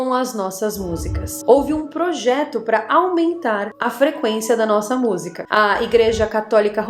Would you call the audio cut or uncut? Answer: cut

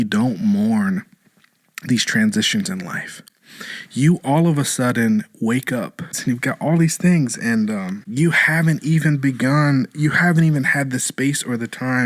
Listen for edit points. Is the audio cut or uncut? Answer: cut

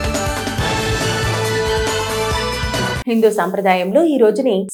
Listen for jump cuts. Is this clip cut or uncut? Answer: uncut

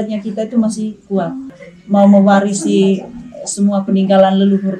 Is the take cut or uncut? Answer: cut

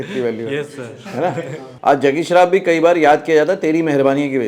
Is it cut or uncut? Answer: cut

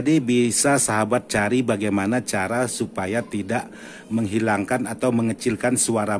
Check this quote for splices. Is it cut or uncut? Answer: uncut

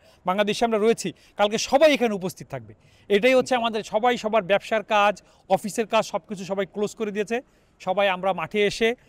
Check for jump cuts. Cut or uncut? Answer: uncut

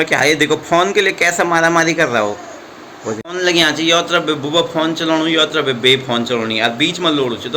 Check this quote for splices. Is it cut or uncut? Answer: cut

